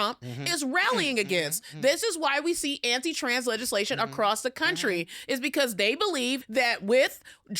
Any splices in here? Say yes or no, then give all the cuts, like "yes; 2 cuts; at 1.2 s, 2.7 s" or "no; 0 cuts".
yes; 1 cut; at 6.4 s